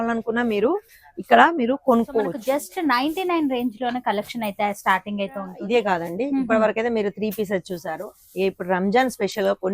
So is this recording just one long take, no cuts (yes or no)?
no